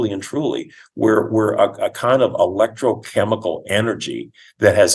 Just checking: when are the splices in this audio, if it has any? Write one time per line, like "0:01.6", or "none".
none

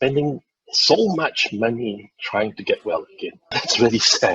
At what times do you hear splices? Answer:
0:03.4

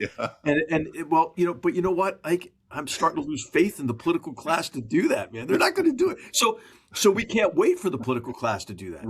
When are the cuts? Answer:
none

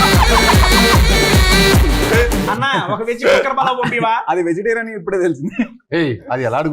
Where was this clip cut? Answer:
0:02.5

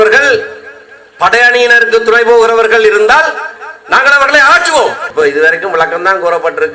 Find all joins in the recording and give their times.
0:05.1

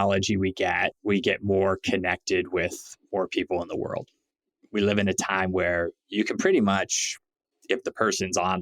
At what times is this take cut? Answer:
0:01.0

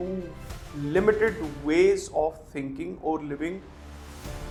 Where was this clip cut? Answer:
none

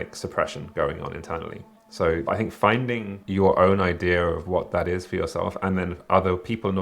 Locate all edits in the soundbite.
0:02.2
0:03.2

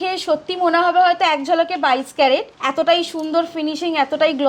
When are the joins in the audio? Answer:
0:02.6

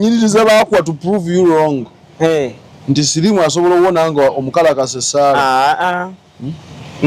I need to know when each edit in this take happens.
none

